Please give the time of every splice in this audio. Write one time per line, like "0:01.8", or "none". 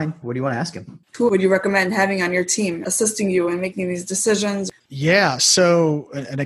0:01.1
0:02.8
0:04.6